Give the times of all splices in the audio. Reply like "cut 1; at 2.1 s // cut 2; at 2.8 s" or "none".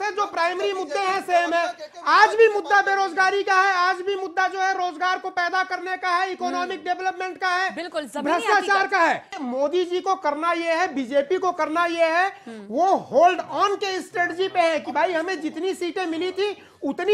cut 1; at 9.4 s